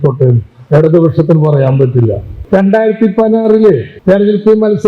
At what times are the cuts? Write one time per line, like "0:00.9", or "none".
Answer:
0:02.3
0:03.9